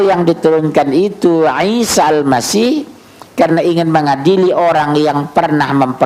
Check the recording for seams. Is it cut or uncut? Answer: uncut